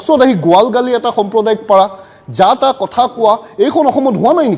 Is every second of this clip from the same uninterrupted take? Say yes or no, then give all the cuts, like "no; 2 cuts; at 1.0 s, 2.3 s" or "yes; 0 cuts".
yes; 0 cuts